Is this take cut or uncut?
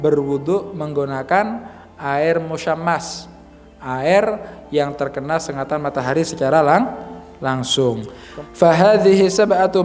cut